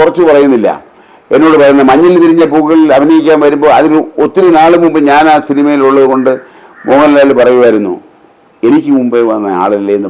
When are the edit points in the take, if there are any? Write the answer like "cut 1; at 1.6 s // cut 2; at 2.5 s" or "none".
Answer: none